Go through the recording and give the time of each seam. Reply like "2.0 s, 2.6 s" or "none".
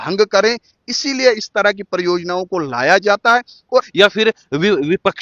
3.9 s